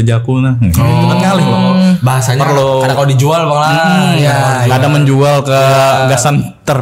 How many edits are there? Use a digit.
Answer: 0